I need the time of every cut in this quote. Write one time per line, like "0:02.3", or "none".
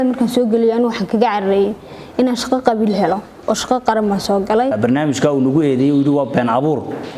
0:04.7